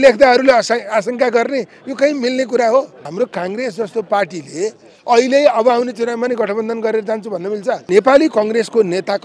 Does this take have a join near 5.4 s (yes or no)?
no